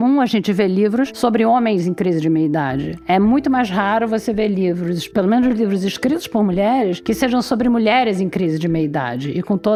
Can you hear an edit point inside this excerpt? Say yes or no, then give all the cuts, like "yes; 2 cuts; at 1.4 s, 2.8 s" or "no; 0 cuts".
no; 0 cuts